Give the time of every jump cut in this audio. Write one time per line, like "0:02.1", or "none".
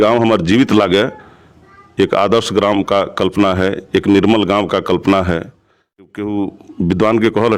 0:06.1

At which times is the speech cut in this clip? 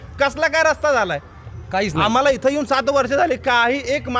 none

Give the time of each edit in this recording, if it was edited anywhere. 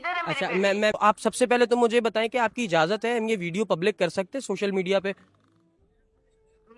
0:00.9

